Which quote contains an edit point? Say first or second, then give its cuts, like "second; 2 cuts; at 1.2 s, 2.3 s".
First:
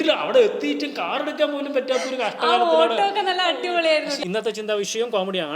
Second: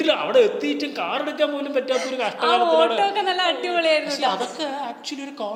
first; 1 cut; at 4.2 s